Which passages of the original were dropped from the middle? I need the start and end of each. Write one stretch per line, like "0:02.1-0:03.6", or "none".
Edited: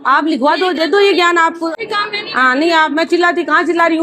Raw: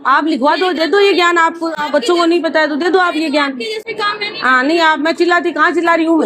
0:01.8-0:03.9

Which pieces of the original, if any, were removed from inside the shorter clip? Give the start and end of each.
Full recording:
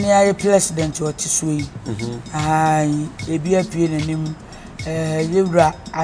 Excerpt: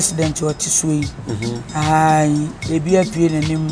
none

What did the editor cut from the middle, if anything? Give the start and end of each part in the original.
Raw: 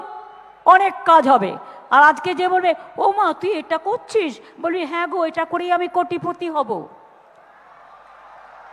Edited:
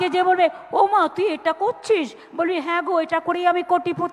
none

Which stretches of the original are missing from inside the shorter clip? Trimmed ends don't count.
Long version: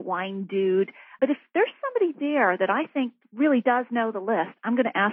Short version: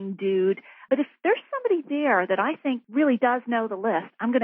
0:03.1-0:03.3

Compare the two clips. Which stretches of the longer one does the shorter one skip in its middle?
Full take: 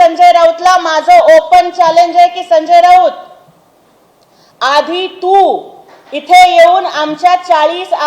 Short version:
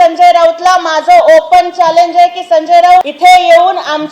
0:03.0-0:06.1

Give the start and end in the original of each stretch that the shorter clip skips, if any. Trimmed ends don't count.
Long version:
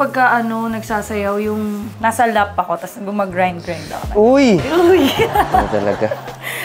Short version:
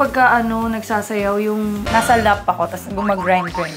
0:01.8-0:01.9

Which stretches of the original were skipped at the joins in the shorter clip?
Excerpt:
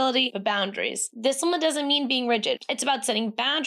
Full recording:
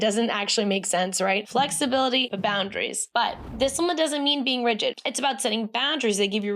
0:03.0-0:03.4

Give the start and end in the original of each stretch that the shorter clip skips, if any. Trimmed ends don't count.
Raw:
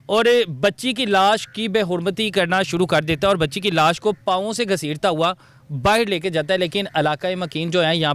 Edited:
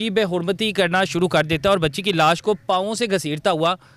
none

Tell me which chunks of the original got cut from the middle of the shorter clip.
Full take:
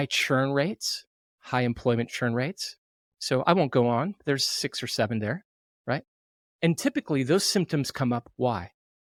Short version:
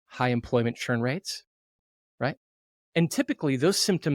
0:03.1-0:05.5

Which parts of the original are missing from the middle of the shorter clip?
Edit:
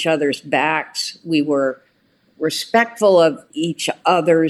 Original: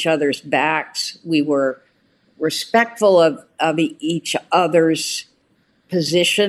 0:03.5-0:04.0

